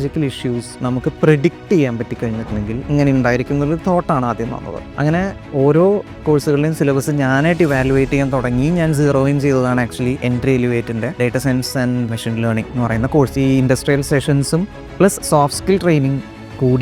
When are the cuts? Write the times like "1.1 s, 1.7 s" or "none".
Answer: 2.9 s, 4.8 s, 10.2 s, 12.1 s, 13.3 s

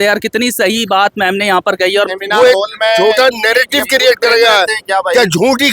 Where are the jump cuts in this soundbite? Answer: 2.1 s

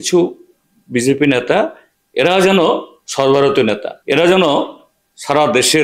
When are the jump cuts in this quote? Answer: 3.9 s

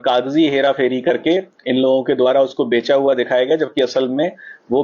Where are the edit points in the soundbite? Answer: 3.0 s

